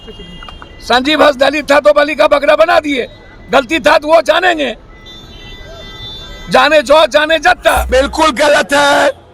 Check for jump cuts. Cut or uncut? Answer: cut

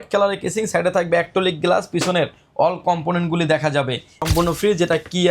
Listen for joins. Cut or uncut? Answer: cut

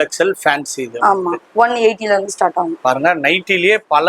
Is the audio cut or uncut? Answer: uncut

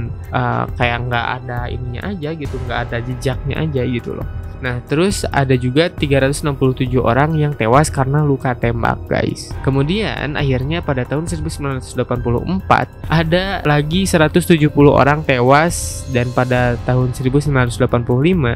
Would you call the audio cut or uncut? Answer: uncut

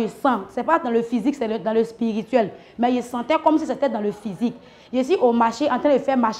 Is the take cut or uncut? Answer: uncut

